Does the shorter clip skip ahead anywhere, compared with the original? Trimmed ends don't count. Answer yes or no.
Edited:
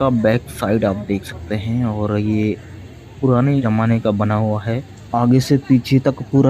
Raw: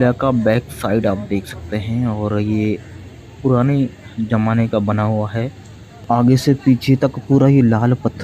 yes